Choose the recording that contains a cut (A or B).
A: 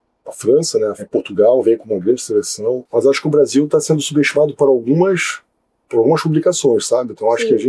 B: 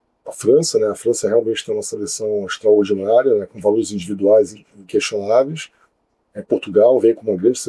A